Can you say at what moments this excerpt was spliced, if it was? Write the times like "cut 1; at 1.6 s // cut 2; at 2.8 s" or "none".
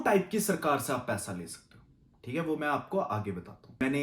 none